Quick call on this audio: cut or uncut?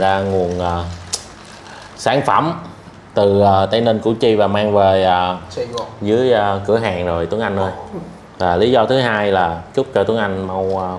uncut